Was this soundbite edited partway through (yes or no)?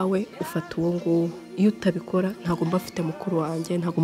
yes